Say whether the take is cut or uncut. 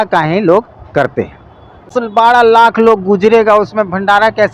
cut